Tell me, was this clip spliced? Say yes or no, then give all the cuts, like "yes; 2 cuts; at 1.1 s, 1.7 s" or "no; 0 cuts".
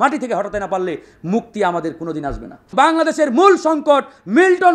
yes; 1 cut; at 2.7 s